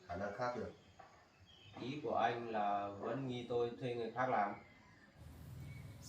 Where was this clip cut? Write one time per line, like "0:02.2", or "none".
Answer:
0:05.2